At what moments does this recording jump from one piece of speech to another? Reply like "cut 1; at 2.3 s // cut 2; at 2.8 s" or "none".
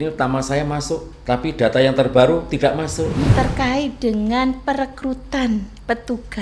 cut 1; at 1.1 s // cut 2; at 3.3 s